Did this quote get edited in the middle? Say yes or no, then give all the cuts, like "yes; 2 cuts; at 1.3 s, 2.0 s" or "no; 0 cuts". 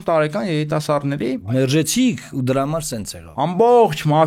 yes; 2 cuts; at 1.5 s, 3.2 s